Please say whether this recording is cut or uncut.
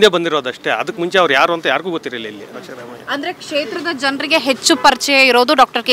uncut